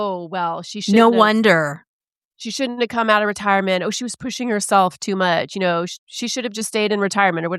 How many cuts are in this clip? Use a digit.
0